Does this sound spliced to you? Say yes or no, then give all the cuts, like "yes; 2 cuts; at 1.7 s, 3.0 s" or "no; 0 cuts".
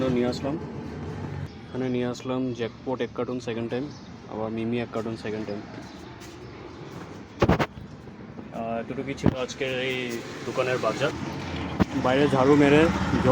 yes; 2 cuts; at 1.5 s, 11.1 s